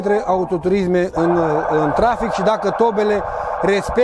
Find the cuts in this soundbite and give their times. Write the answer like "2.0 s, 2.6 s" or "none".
none